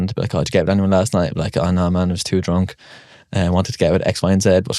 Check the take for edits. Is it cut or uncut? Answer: uncut